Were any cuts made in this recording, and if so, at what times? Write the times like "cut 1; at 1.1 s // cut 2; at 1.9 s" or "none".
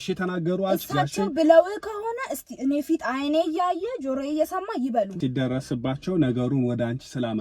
cut 1; at 5.1 s